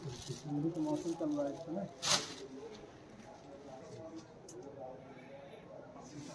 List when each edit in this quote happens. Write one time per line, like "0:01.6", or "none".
0:03.8